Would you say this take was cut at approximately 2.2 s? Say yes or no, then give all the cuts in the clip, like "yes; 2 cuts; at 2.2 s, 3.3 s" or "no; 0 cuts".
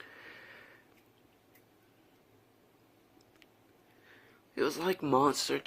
yes; 1 cut; at 2.2 s